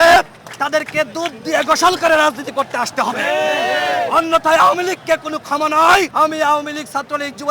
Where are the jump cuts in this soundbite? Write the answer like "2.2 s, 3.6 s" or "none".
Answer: 6.1 s